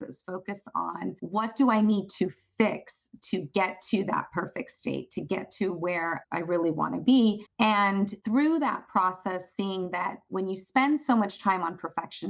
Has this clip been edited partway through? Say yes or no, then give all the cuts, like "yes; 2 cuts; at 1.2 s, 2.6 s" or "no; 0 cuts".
yes; 1 cut; at 1.2 s